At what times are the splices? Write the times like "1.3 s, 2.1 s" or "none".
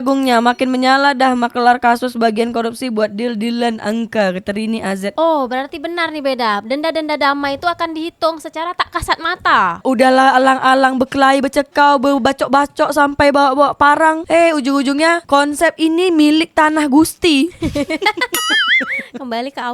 9.8 s